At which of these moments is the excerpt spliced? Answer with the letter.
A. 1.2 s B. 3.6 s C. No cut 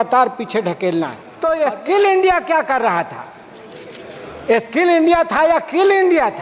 A